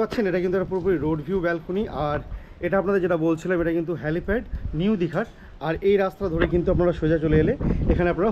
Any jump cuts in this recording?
no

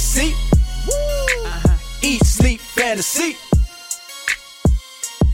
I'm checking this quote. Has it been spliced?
no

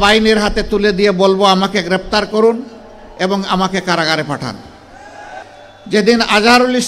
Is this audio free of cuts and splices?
no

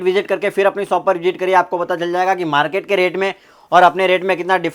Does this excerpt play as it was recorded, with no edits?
yes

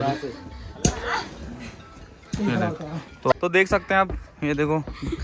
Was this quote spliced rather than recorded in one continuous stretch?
yes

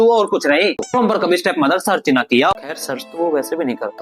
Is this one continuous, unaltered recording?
no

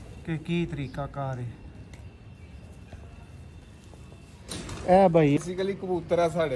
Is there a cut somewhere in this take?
yes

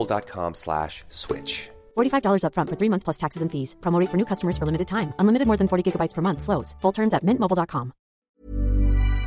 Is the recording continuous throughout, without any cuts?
no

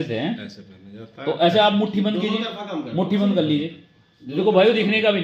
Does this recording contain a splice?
no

